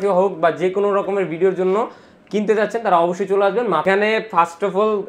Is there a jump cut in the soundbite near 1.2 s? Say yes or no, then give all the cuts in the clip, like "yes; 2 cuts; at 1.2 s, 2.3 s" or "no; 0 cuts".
no; 1 cut; at 3.8 s